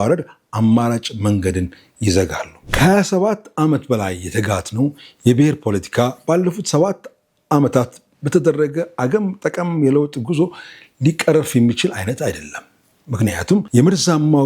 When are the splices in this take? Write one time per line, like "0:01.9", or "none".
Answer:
0:02.6
0:13.7